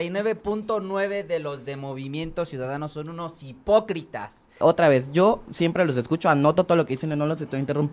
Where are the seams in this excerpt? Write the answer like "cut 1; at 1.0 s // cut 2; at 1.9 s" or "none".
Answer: cut 1; at 4.6 s